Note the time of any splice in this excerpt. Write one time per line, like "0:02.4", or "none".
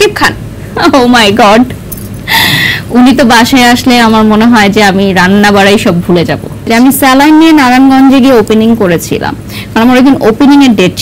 0:06.7